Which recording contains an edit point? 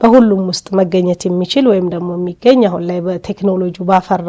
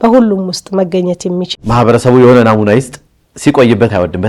second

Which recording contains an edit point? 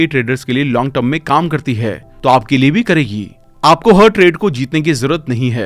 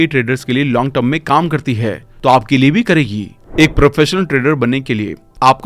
second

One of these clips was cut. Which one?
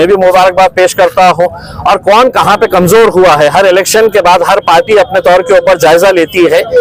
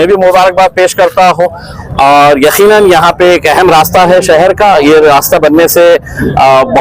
second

